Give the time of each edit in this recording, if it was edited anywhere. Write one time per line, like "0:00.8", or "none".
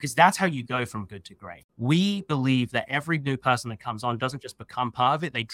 0:01.6